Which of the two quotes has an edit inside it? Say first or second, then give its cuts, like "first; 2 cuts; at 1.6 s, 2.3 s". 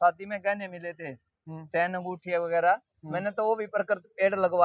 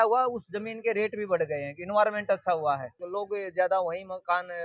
second; 1 cut; at 3.0 s